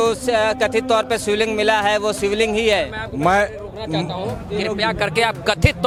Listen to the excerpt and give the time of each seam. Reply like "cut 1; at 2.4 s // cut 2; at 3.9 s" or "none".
none